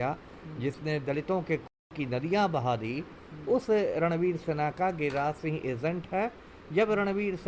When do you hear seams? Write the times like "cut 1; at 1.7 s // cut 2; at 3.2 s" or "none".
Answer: none